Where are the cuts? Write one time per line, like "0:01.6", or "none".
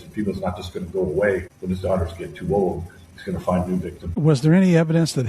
0:01.5
0:04.1